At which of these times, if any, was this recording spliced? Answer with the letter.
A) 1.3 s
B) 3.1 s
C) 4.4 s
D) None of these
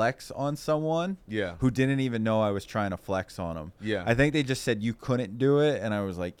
D